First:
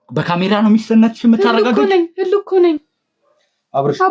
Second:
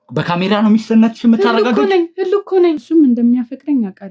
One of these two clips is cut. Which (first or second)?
second